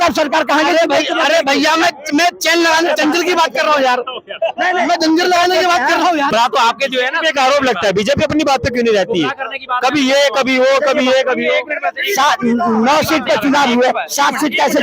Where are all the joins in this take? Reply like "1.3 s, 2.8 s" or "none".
6.3 s